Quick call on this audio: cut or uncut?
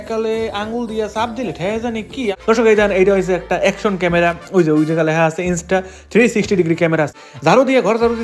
cut